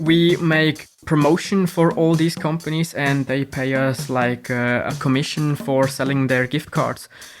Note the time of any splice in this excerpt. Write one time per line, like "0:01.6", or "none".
0:00.9
0:04.9